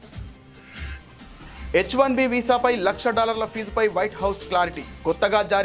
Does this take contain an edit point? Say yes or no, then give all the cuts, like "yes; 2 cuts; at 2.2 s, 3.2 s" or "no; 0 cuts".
yes; 1 cut; at 1.7 s